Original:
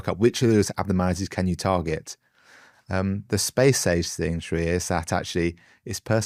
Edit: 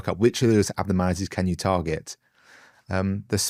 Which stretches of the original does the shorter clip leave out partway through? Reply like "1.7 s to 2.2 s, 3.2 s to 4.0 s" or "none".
none